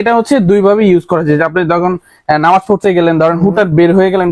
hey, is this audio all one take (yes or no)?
yes